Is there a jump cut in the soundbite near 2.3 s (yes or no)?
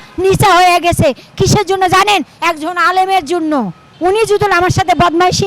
no